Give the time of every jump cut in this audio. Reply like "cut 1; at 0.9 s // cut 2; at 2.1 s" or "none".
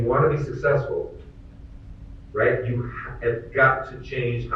none